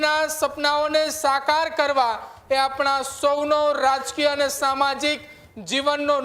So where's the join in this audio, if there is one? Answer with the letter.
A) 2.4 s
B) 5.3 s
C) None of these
C